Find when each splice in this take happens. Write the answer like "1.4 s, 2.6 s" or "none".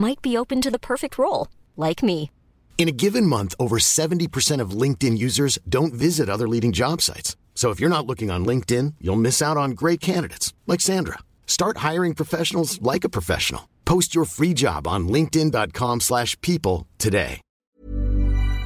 17.7 s